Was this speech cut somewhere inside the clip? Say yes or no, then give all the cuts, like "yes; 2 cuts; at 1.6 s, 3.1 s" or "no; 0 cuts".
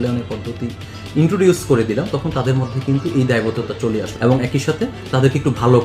yes; 1 cut; at 4.1 s